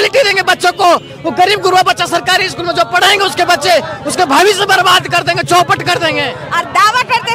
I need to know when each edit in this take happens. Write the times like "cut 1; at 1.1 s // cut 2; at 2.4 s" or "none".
cut 1; at 6.4 s